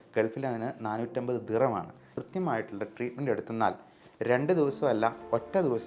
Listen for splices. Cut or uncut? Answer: cut